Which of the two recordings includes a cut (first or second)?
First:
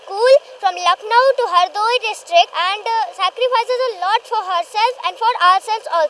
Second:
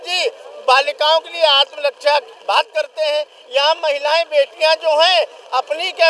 first